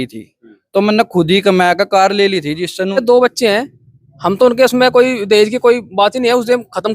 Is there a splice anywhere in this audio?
yes; 1 cut; at 3.0 s

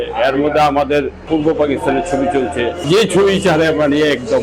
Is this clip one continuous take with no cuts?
no; 2 cuts; at 1.2 s, 2.9 s

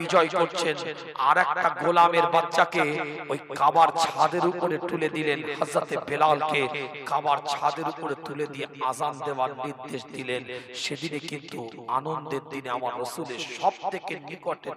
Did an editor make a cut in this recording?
no; 0 cuts

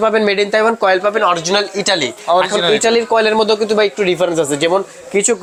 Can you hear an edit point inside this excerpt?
no; 0 cuts

